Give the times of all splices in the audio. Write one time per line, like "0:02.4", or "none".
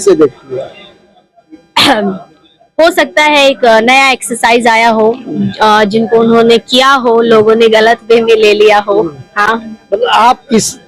none